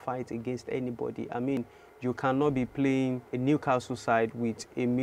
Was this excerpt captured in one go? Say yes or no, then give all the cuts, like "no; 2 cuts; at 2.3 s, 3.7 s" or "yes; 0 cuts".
no; 2 cuts; at 1.6 s, 3.3 s